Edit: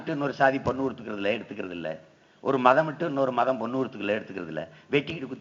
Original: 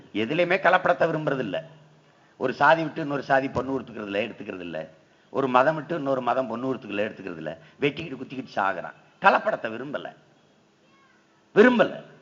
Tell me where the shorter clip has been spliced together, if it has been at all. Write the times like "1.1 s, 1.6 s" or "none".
none